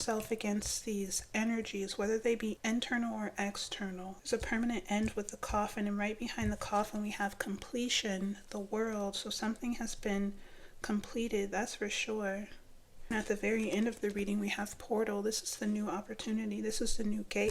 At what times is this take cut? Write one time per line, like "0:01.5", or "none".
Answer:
0:02.6
0:04.1
0:13.1